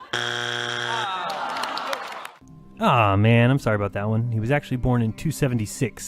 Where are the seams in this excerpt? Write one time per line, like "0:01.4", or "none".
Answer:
0:01.6